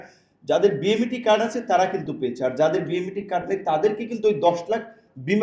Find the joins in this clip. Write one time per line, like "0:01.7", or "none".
none